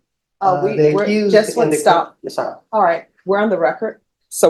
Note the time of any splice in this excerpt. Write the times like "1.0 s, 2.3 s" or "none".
none

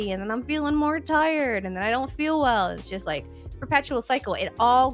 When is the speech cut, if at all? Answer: none

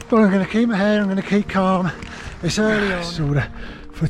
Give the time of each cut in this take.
3.1 s

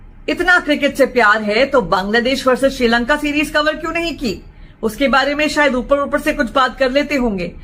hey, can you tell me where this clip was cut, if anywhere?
none

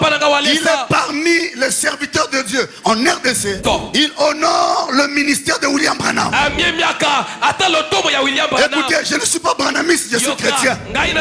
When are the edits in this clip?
3.6 s

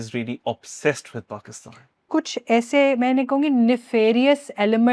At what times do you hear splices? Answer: 2.1 s

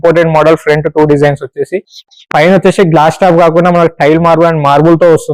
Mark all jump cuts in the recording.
2.1 s

